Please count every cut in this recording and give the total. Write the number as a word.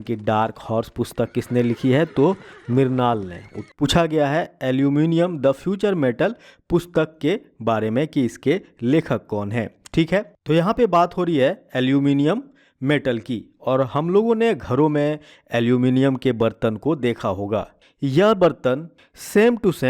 one